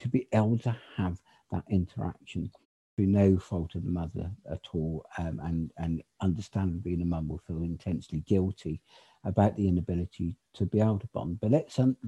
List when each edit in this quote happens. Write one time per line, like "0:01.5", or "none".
0:02.8